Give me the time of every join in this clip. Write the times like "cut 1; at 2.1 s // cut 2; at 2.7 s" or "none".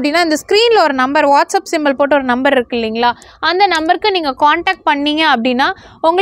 none